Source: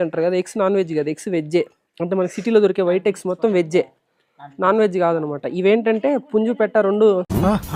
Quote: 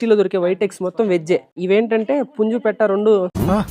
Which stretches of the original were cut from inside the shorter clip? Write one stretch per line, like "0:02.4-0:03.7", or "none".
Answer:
0:04.0-0:05.5